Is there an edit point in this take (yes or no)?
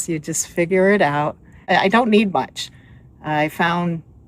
yes